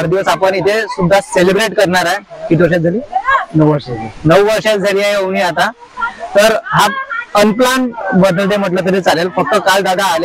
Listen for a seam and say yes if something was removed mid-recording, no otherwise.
no